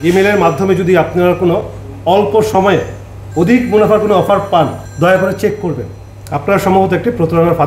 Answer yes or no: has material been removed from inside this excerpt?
yes